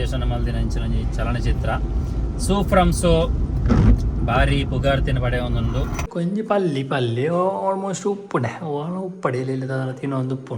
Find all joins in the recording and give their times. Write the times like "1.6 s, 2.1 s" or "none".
6.1 s